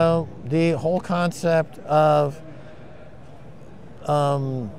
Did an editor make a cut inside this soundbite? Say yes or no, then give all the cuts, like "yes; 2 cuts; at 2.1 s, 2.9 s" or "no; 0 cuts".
no; 0 cuts